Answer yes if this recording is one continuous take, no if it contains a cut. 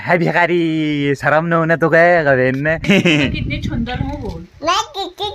no